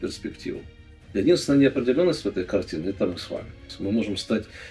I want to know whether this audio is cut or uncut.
cut